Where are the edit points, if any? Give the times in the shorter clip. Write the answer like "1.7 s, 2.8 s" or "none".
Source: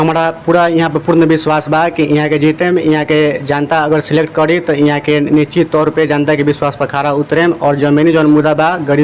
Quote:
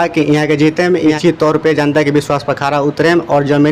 1.2 s